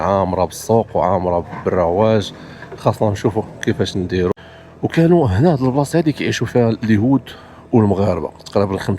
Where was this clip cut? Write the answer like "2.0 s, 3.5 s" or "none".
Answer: 4.3 s